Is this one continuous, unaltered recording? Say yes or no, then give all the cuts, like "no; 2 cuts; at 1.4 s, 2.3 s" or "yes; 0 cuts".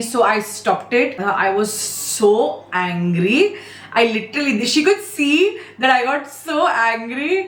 no; 1 cut; at 1.2 s